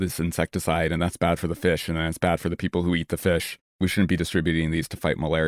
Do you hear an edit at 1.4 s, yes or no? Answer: no